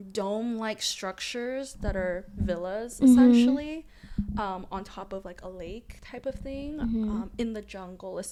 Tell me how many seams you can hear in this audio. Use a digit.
0